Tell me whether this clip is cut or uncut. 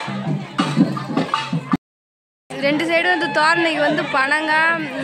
cut